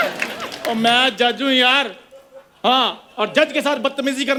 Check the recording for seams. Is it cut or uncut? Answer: uncut